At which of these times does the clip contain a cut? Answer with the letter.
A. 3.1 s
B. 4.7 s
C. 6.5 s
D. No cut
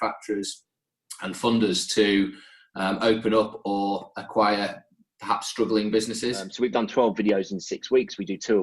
C